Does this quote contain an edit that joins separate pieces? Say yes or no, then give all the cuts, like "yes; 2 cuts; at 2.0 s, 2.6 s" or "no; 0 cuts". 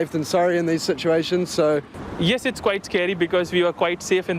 yes; 1 cut; at 2.0 s